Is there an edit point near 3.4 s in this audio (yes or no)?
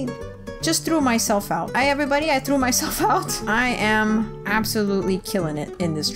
yes